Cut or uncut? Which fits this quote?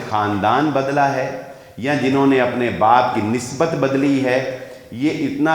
uncut